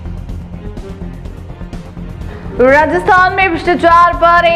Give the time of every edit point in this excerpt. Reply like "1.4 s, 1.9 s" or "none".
2.2 s